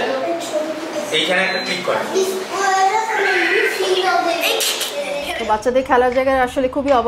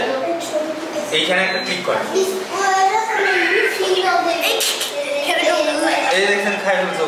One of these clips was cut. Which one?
first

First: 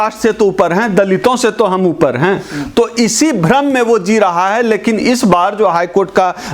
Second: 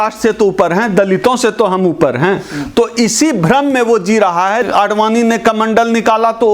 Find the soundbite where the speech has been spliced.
second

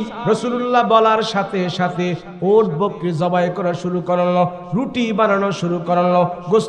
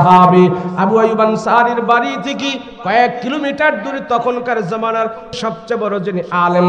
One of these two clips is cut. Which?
second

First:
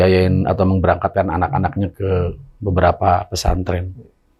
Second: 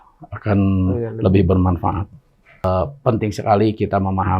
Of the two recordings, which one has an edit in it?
second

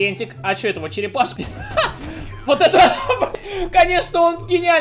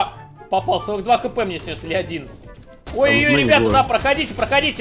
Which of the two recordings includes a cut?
first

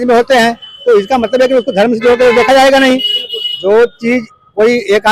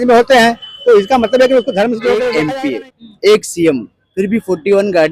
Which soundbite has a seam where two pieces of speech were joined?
second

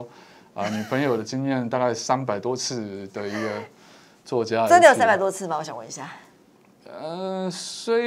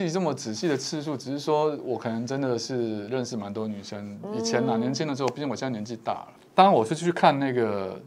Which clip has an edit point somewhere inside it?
second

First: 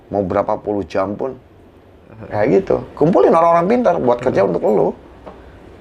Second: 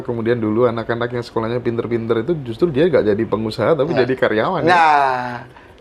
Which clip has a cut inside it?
first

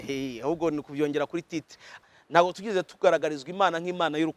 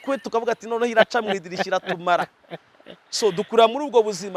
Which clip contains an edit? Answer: first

